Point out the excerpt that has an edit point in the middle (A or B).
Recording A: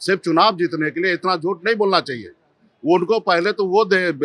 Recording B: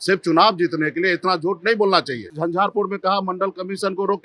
B